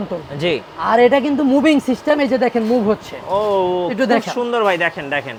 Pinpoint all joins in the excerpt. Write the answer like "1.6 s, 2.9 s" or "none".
none